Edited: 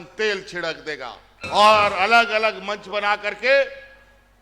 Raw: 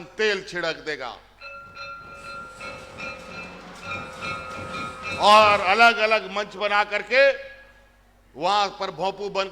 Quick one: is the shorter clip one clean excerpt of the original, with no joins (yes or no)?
no